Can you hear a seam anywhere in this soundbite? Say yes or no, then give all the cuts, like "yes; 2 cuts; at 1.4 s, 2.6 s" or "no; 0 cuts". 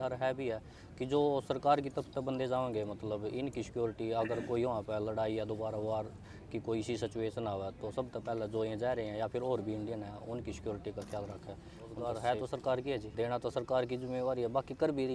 yes; 2 cuts; at 12.0 s, 13.1 s